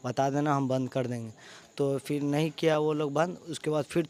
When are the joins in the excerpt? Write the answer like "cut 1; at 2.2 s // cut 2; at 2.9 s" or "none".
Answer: none